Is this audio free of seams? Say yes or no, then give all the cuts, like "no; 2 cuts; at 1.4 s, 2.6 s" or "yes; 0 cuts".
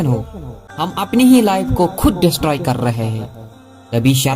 no; 1 cut; at 1.1 s